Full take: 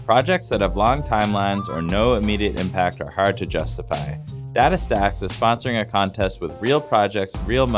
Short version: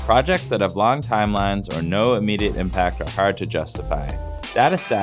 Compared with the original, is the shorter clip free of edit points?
yes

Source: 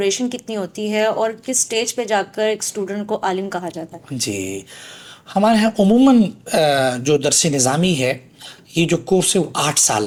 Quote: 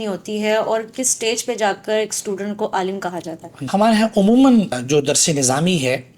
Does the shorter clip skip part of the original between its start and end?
yes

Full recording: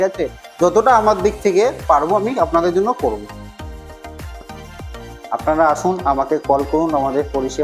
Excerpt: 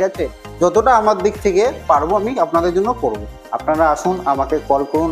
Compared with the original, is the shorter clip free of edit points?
no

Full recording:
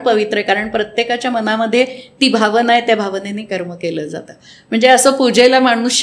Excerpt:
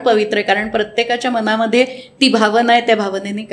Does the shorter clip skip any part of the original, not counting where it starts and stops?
no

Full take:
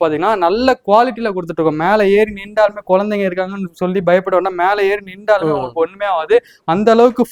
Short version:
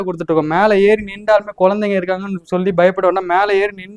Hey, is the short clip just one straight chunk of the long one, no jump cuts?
yes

